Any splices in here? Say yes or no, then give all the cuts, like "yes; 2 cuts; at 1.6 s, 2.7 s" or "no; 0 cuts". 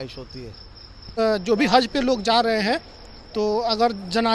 yes; 1 cut; at 1.1 s